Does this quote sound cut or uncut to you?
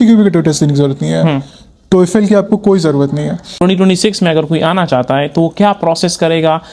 cut